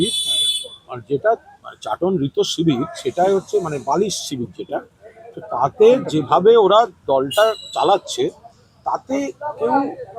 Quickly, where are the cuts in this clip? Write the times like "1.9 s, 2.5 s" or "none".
none

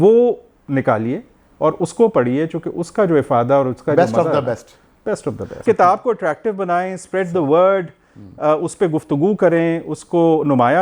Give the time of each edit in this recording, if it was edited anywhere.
5.6 s

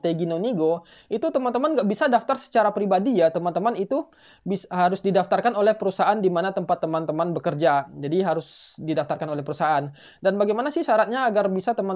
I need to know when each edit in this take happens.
none

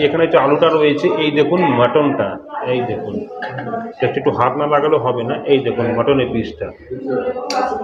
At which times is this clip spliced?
none

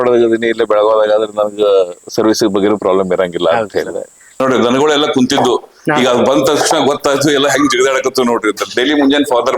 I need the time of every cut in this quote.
4.4 s

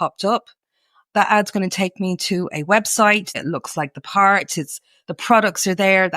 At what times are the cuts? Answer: 3.4 s

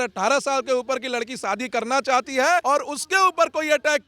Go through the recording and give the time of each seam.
2.6 s

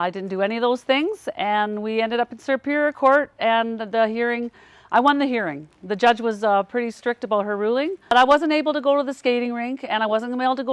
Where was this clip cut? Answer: none

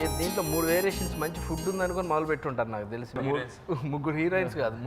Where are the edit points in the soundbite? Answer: 3.2 s

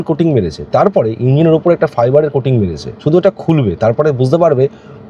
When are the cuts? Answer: 2.9 s

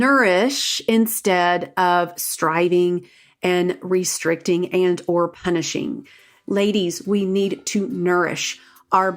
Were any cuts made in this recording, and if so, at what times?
6.3 s

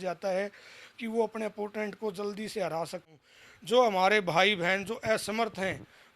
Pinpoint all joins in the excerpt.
3.1 s

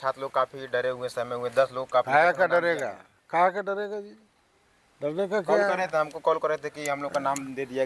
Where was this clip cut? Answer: none

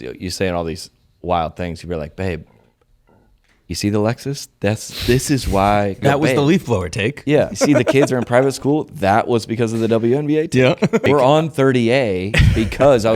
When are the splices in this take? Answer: 6.0 s, 7.7 s, 11.0 s

